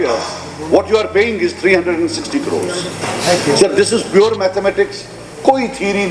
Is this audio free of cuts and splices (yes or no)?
yes